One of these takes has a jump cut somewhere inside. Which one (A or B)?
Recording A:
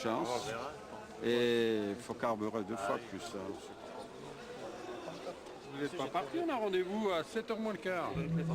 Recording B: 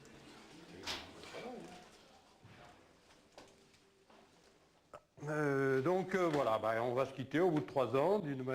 A